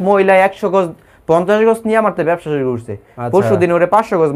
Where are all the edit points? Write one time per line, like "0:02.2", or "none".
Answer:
none